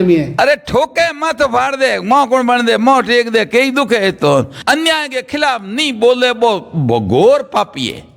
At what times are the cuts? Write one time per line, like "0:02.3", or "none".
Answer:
0:04.6